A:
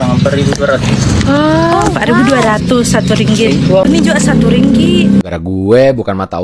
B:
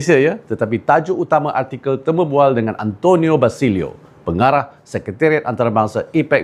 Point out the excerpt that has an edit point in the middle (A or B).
A